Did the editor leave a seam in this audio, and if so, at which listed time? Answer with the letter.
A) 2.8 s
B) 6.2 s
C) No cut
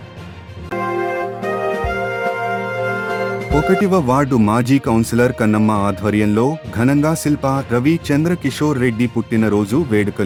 C